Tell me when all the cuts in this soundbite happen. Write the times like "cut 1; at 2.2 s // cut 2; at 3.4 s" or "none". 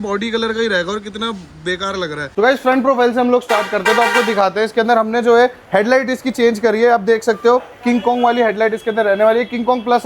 cut 1; at 2.3 s